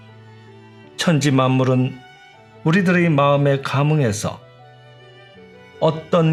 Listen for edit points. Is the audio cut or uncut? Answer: uncut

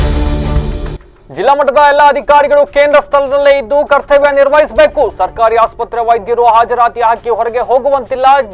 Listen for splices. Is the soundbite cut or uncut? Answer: cut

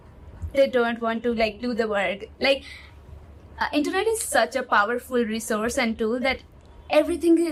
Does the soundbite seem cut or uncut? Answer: uncut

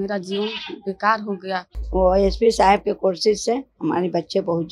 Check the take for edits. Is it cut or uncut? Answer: cut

